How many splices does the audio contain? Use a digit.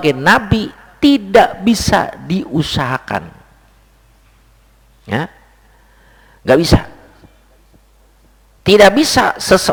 0